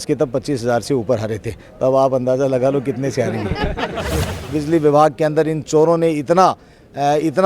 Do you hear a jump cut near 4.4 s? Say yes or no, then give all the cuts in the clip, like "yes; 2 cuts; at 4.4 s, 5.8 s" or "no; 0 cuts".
yes; 1 cut; at 4.4 s